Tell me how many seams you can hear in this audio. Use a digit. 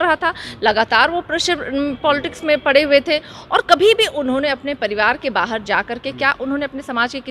0